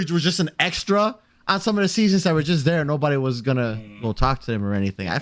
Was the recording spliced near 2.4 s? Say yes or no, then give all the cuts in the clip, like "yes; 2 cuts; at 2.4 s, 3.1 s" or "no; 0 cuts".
no; 0 cuts